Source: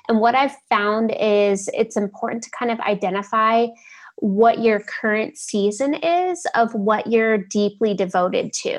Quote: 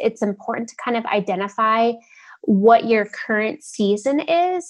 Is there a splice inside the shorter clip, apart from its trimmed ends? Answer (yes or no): no